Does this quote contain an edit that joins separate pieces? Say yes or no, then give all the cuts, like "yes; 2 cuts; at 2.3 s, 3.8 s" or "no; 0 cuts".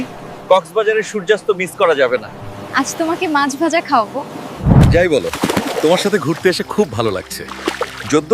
yes; 1 cut; at 4.6 s